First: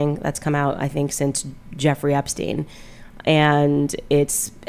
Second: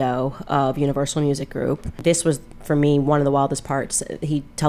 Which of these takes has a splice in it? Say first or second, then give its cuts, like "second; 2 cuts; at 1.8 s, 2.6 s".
second; 1 cut; at 2.0 s